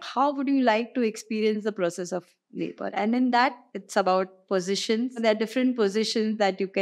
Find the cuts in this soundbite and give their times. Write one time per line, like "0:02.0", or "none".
0:03.7
0:05.2